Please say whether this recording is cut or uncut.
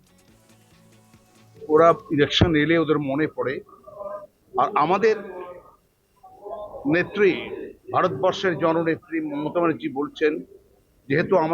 cut